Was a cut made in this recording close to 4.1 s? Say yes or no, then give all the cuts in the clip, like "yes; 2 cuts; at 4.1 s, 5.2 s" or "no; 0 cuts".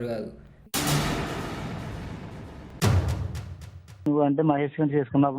yes; 1 cut; at 4.1 s